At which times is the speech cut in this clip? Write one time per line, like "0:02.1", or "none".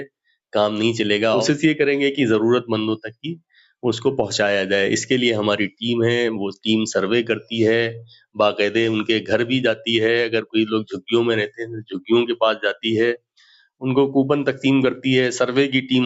0:01.4